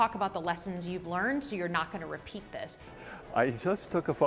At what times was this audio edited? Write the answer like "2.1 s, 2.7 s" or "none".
2.8 s